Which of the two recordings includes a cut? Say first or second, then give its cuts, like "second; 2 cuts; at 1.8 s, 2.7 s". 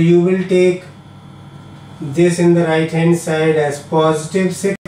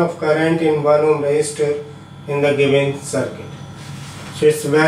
second; 1 cut; at 1.5 s